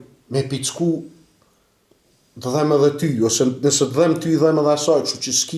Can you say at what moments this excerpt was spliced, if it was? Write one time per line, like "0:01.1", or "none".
none

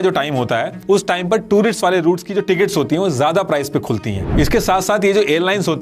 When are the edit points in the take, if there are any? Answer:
0:04.2

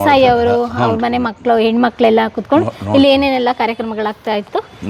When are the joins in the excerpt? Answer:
none

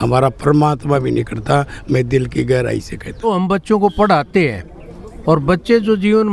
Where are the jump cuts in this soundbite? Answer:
0:03.2

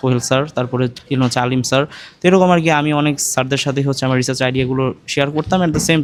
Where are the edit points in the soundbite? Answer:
none

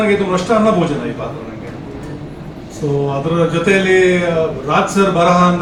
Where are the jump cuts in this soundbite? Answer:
none

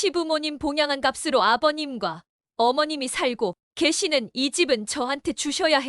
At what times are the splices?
none

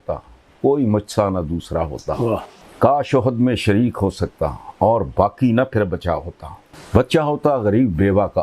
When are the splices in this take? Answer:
0:02.6

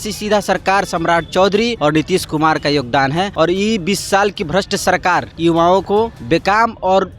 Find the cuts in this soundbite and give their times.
0:01.7
0:03.3
0:05.3
0:06.2

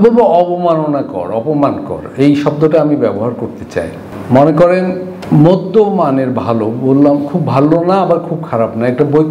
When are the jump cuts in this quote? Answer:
none

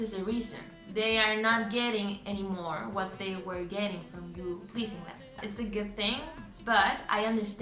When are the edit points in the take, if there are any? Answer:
0:05.4

